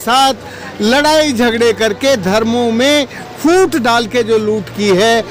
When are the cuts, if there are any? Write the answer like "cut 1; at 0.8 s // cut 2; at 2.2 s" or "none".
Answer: none